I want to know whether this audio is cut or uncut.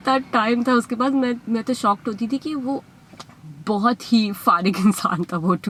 uncut